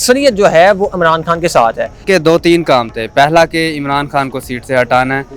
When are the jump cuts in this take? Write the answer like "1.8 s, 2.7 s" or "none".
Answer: 2.0 s